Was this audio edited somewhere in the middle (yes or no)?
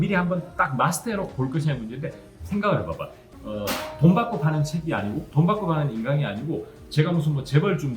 yes